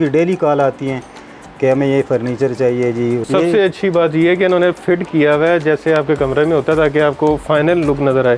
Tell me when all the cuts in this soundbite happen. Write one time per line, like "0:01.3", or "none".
0:03.3